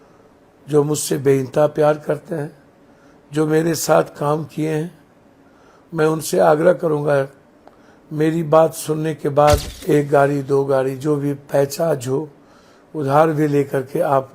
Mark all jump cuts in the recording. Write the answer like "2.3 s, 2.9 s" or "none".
9.7 s